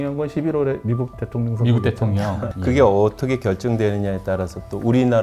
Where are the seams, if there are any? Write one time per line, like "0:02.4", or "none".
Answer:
0:02.5